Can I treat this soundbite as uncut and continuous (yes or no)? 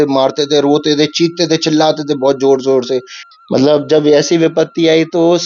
no